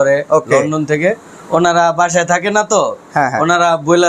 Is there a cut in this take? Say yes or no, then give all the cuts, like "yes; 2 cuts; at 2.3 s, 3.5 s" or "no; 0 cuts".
no; 0 cuts